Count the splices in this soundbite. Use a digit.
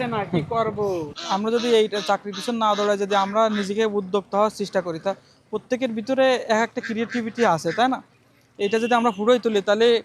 1